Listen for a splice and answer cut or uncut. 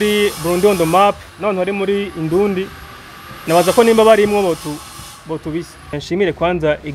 cut